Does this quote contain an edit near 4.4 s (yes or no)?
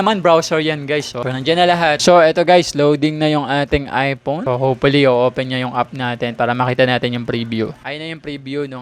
yes